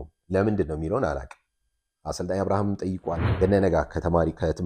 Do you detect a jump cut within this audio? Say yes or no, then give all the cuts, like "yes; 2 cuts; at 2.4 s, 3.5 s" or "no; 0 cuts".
yes; 1 cut; at 3.3 s